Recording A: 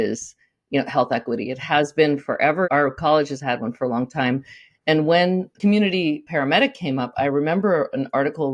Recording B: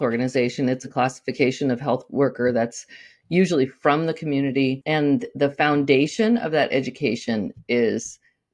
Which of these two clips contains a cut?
A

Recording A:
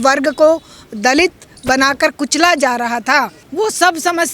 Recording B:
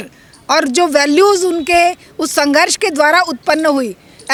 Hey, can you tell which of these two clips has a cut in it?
A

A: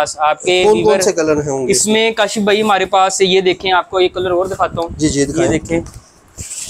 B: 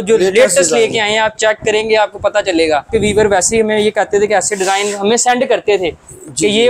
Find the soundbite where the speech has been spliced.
B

